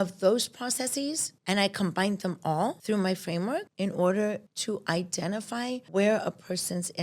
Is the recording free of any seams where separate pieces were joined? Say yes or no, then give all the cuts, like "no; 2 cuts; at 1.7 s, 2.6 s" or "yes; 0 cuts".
no; 5 cuts; at 1.3 s, 2.8 s, 3.7 s, 4.5 s, 5.8 s